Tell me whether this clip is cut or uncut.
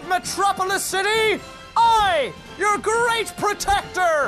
uncut